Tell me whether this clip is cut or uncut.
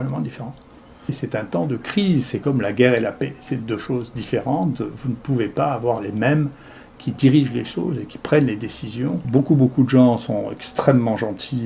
cut